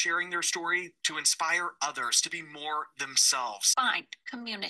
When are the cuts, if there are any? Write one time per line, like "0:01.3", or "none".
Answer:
0:03.6